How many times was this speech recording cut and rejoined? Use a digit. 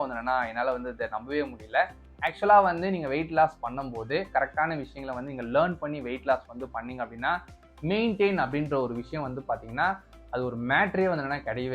0